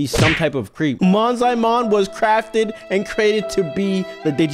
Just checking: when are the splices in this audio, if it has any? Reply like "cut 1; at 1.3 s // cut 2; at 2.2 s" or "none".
cut 1; at 1.0 s